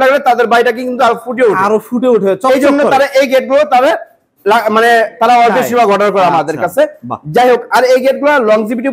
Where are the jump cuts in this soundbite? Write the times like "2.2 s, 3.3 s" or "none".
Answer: none